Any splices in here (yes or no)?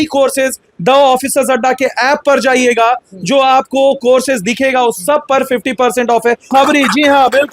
yes